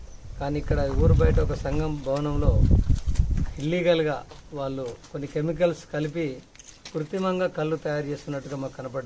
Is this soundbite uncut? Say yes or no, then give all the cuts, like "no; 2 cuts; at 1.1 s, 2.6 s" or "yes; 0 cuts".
yes; 0 cuts